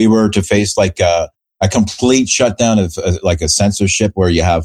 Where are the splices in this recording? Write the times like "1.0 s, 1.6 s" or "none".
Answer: none